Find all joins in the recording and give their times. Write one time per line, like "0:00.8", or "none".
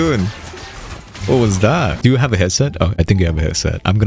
0:02.0

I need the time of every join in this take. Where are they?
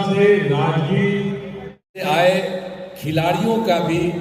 0:01.9

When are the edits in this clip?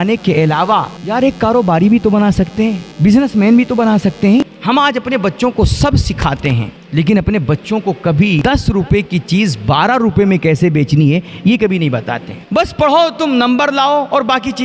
0:01.0
0:02.9
0:04.4
0:06.8
0:08.4
0:12.4

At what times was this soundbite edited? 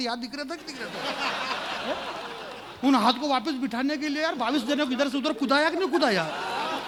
none

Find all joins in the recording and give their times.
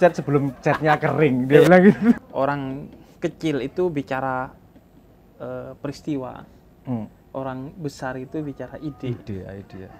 0:02.2

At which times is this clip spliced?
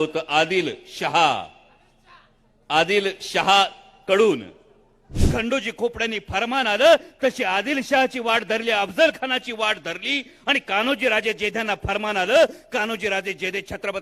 0:05.2

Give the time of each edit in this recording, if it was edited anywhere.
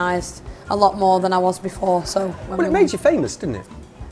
0:02.4

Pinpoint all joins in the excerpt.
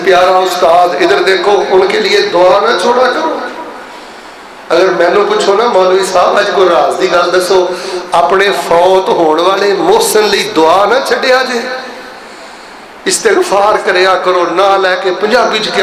none

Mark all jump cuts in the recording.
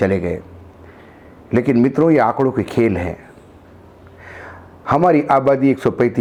none

